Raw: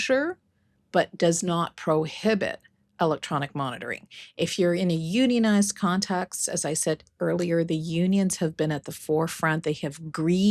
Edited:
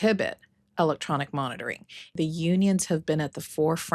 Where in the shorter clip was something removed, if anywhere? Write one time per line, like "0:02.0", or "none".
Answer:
0:02.2